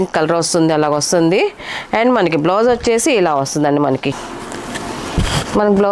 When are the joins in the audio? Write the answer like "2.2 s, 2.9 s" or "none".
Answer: 4.3 s